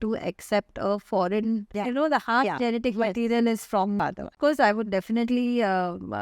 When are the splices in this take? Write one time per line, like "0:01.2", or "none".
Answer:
0:01.8
0:04.1